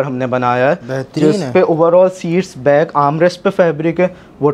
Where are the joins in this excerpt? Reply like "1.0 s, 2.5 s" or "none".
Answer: none